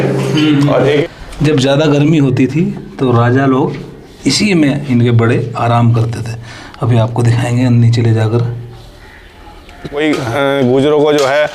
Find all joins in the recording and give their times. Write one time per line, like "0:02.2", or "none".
0:01.0
0:10.0